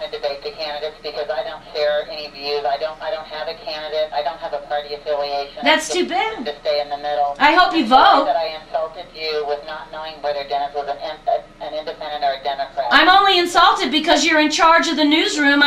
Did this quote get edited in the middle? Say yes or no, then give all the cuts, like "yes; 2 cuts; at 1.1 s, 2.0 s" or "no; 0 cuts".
no; 0 cuts